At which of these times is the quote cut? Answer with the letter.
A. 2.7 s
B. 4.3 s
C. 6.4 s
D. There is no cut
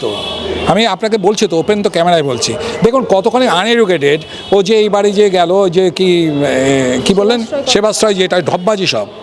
D